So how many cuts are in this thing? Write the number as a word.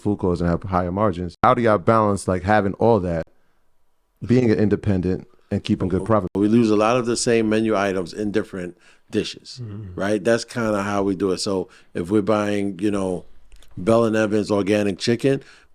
two